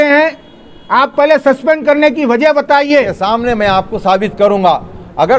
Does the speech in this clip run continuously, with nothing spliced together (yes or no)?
no